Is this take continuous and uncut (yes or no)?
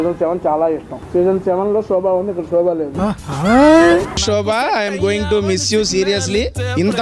no